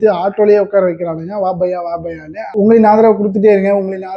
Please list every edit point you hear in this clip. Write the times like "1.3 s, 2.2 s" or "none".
2.4 s